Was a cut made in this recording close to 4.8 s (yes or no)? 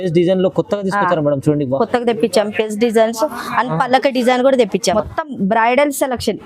yes